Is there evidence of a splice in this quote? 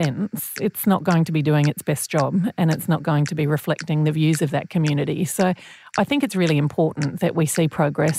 no; 0 cuts

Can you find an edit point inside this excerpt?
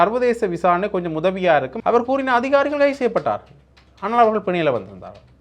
yes; 1 cut; at 1.7 s

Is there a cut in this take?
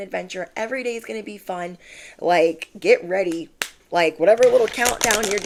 no; 0 cuts

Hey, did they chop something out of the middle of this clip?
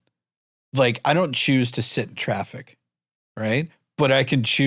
no; 0 cuts

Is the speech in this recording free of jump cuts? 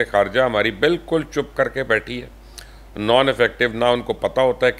yes; 0 cuts

